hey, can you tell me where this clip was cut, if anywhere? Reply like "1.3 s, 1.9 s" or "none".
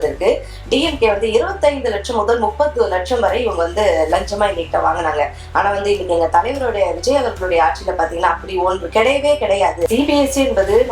9.9 s

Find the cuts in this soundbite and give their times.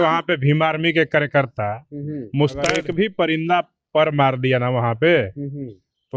2.8 s

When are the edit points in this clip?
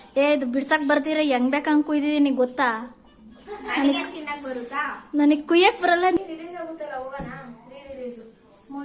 6.2 s

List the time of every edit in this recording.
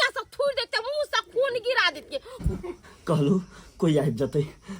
2.4 s

